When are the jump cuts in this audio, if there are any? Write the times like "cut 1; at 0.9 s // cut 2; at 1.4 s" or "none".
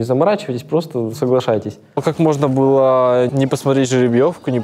cut 1; at 2.0 s // cut 2; at 3.3 s